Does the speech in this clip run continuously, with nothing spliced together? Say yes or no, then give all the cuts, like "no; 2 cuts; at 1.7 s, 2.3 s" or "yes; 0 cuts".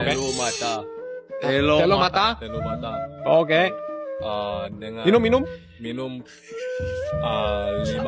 yes; 0 cuts